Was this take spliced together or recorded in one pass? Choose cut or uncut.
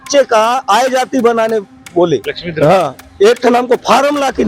cut